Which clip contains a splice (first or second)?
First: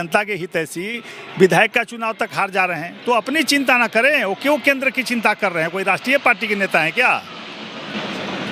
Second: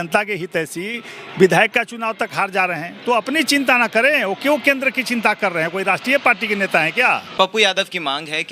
second